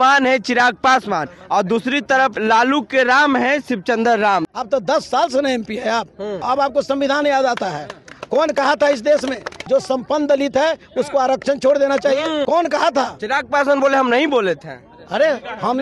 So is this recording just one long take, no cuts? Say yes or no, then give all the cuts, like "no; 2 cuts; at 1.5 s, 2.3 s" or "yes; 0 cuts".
no; 5 cuts; at 2.4 s, 4.5 s, 6.4 s, 9.6 s, 12.4 s